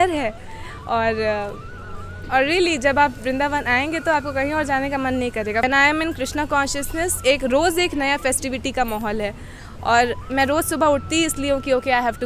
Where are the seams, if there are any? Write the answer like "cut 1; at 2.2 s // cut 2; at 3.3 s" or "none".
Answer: cut 1; at 5.6 s